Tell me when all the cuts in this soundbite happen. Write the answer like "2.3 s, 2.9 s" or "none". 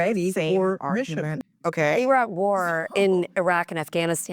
1.4 s